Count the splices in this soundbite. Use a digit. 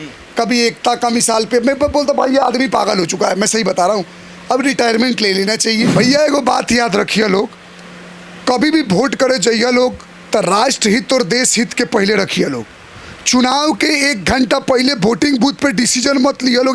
1